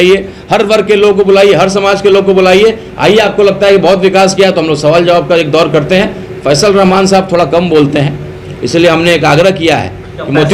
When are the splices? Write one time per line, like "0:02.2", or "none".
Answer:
none